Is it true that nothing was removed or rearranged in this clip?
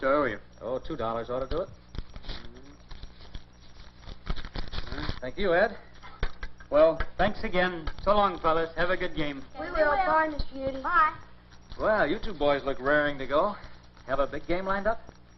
no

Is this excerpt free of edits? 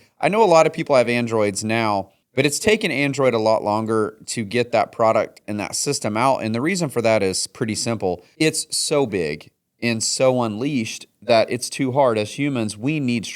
no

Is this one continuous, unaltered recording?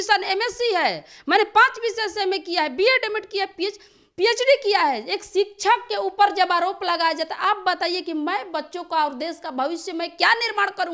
yes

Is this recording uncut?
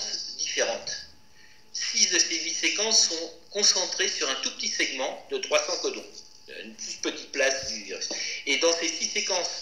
yes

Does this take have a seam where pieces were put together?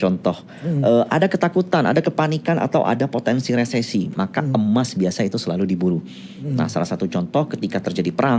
no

